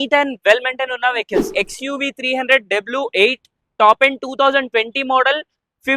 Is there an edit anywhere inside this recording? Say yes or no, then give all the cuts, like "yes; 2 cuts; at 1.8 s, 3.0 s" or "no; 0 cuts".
yes; 1 cut; at 1.5 s